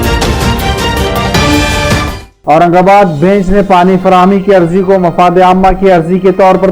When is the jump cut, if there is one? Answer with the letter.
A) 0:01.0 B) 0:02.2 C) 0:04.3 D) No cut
B